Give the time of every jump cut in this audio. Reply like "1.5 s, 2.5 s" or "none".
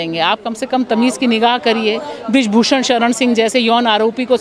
none